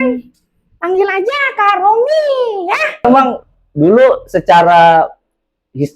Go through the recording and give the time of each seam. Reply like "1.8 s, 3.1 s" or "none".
3.0 s